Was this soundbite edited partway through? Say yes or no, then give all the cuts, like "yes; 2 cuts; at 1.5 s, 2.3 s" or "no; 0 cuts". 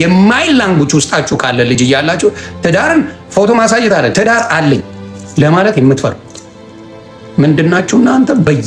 no; 0 cuts